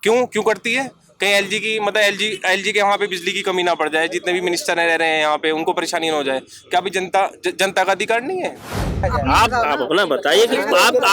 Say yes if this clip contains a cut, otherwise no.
yes